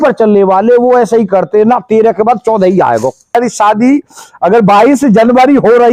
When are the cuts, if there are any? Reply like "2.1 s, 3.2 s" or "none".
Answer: 3.3 s